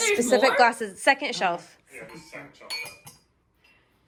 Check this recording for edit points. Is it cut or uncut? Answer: uncut